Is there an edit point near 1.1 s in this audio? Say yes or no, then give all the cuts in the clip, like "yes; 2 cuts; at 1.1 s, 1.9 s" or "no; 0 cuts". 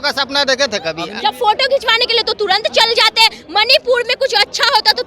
yes; 1 cut; at 1.1 s